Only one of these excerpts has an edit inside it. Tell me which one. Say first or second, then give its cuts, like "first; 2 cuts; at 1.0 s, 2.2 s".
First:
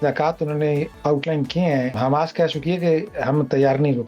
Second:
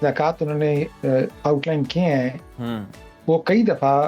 first; 2 cuts; at 0.9 s, 2.0 s